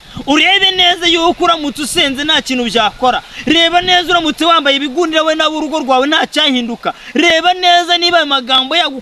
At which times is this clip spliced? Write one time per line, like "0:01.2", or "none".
none